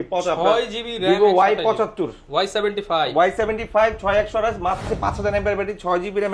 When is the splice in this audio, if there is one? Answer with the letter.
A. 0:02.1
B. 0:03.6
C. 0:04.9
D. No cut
C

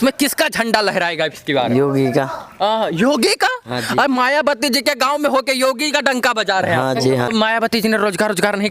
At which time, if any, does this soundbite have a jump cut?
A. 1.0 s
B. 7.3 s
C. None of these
B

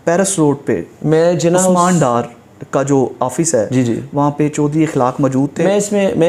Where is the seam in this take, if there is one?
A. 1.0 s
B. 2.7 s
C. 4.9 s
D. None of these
D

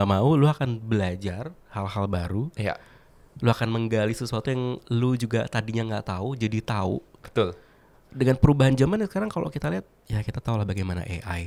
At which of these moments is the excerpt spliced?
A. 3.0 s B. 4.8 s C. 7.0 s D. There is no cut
D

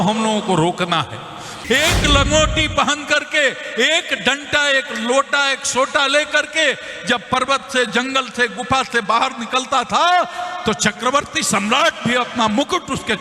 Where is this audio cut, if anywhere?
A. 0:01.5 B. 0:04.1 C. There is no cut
A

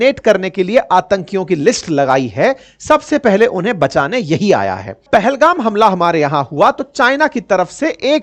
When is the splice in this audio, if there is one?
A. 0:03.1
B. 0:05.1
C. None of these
B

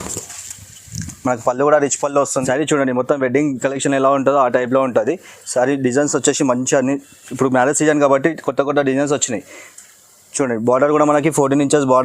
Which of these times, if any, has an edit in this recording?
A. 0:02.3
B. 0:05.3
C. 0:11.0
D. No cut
A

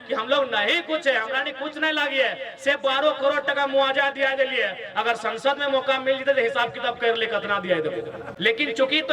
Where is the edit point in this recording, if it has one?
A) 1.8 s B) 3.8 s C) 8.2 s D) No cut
C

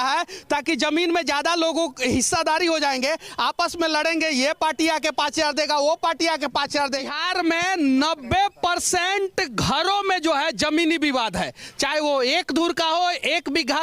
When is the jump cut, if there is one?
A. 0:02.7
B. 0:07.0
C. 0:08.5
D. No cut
B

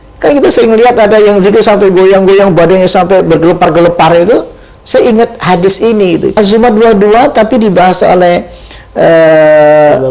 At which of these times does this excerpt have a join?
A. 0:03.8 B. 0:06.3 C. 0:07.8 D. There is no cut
B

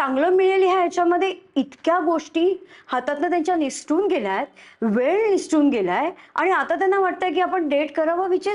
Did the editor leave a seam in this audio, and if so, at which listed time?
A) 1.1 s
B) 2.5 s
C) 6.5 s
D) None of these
D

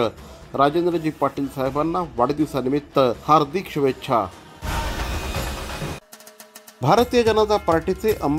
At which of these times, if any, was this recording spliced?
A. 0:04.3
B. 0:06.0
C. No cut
B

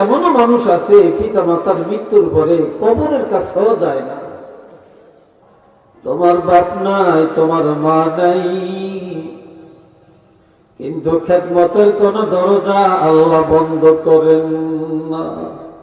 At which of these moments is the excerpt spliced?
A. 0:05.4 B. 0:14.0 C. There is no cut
A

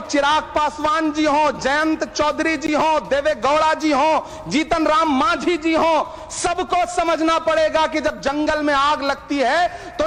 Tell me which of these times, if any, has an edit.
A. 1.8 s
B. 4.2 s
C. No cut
C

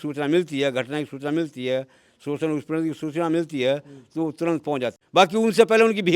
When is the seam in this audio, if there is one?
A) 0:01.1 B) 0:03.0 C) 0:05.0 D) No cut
C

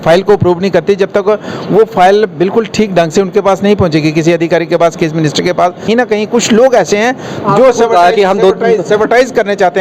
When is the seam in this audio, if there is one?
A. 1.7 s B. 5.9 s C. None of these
B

